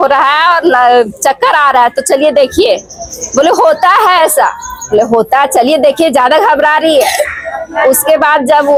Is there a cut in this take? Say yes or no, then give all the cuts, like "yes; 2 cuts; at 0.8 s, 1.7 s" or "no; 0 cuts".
no; 0 cuts